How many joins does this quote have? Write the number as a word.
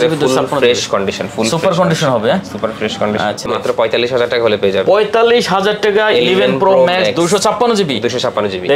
one